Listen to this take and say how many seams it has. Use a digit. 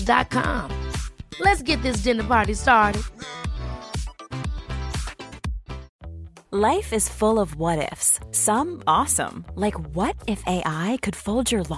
1